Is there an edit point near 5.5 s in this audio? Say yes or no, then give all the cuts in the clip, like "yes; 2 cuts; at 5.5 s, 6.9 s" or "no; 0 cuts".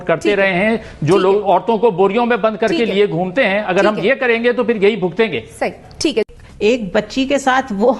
no; 0 cuts